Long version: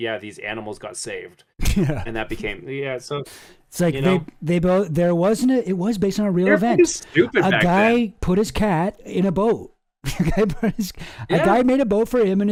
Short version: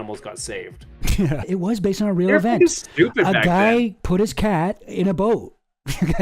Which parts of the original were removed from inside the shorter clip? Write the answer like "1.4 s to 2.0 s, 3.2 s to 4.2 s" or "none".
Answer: 2.1 s to 5.7 s